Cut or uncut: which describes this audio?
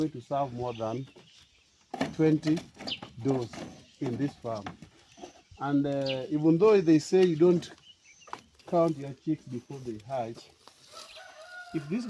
uncut